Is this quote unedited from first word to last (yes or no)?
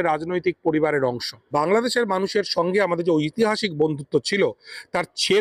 no